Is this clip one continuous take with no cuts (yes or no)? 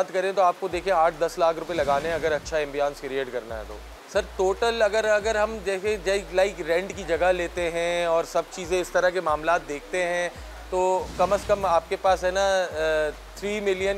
yes